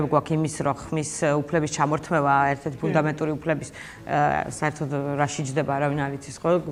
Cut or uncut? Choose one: uncut